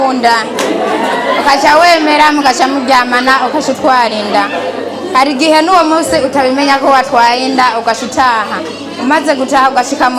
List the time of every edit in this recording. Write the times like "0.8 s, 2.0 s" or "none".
none